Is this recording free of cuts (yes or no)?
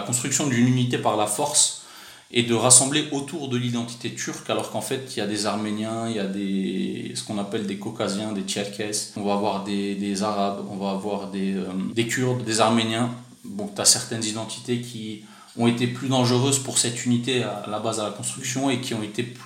no